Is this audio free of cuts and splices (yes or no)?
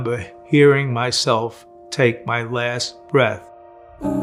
yes